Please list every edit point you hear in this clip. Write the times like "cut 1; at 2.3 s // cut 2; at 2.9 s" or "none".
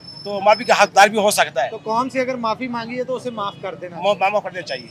cut 1; at 1.8 s